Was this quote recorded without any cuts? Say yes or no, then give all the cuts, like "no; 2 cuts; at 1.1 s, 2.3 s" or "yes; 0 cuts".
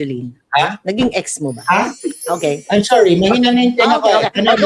yes; 0 cuts